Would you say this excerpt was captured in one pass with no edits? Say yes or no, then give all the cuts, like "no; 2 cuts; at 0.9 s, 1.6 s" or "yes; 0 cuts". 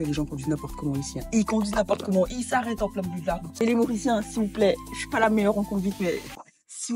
yes; 0 cuts